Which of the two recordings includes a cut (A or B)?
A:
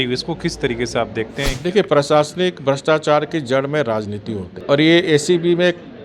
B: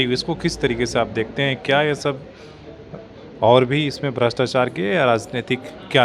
A